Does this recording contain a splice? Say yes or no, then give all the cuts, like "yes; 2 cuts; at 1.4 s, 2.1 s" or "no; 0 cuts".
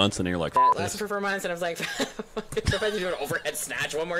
no; 0 cuts